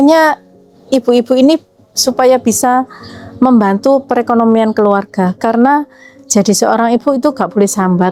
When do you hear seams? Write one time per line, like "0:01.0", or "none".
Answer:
none